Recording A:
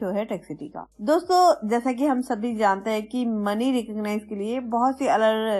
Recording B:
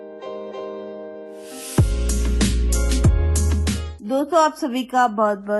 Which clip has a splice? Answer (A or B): B